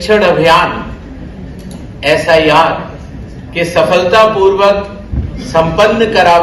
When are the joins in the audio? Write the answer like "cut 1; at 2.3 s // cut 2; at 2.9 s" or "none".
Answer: none